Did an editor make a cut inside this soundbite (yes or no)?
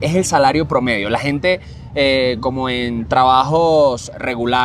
no